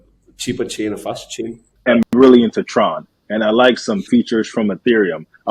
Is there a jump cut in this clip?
yes; 1 cut; at 1.7 s

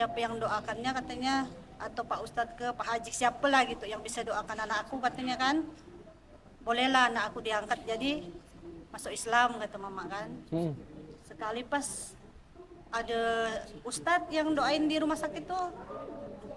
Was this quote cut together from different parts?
no; 0 cuts

